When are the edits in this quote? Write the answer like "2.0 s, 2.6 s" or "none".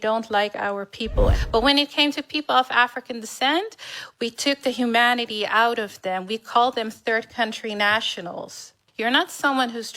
1.4 s, 8.8 s